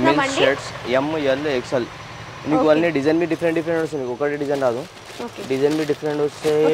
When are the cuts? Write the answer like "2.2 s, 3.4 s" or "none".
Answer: none